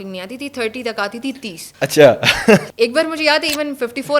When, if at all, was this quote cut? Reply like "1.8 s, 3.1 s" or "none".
1.6 s, 2.7 s